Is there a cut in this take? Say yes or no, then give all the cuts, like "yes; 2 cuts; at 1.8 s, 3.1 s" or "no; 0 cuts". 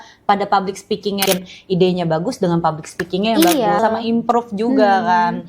yes; 2 cuts; at 1.2 s, 3.8 s